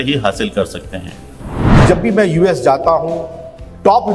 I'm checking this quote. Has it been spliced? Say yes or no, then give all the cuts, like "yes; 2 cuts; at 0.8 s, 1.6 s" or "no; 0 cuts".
yes; 1 cut; at 1.7 s